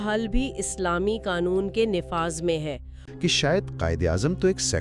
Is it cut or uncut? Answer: cut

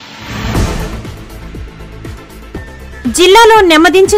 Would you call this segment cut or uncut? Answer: uncut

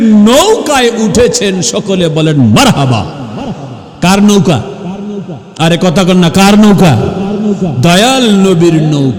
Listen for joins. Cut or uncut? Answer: uncut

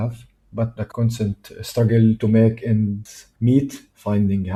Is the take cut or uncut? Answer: uncut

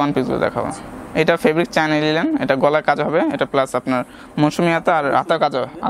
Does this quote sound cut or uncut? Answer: uncut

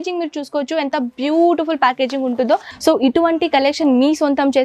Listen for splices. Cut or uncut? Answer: cut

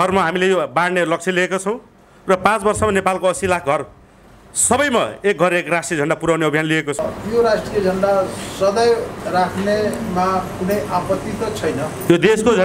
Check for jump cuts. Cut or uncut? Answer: cut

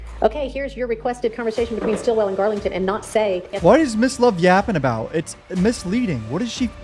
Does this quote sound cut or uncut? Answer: uncut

